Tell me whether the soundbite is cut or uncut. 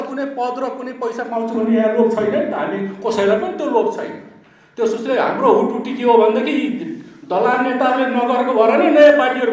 uncut